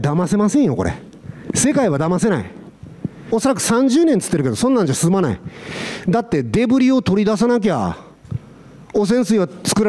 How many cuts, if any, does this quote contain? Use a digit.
1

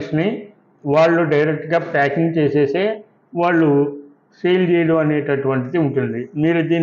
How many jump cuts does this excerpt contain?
0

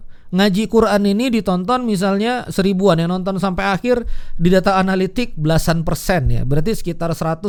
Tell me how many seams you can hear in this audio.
0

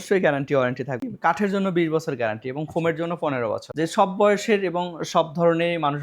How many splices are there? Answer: 2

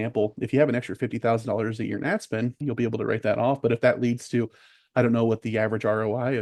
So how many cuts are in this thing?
1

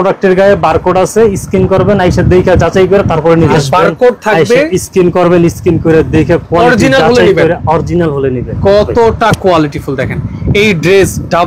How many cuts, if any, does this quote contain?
2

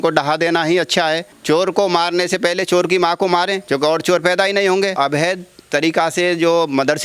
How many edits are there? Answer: 3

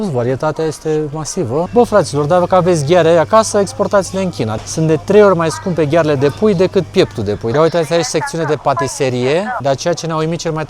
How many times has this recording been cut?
4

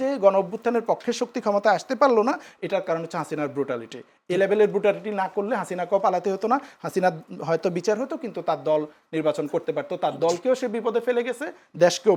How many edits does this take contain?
0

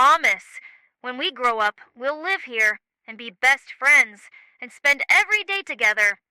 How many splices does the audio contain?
0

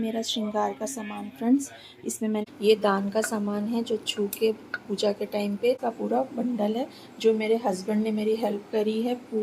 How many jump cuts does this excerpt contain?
2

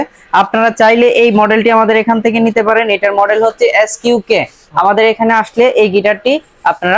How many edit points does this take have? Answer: 0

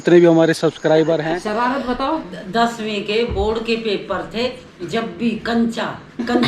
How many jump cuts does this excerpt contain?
1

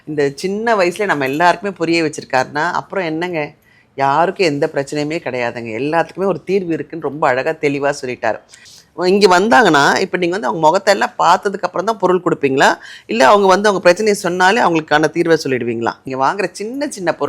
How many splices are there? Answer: 2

